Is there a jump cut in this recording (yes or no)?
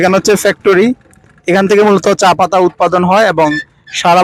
no